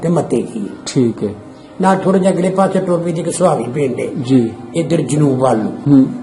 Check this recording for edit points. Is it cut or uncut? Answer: uncut